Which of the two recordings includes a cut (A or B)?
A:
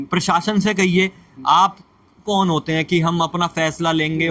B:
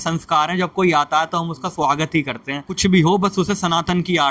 B